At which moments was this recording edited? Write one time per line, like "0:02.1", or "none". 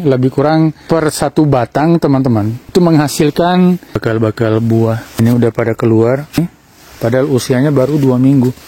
0:00.8
0:02.6
0:04.0
0:05.2
0:06.4